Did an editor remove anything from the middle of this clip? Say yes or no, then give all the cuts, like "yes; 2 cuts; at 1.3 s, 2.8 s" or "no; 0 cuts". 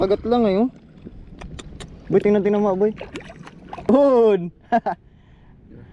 yes; 1 cut; at 3.9 s